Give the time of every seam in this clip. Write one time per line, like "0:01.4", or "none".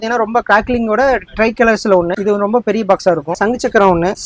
none